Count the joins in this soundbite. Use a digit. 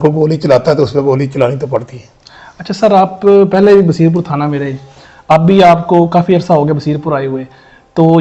0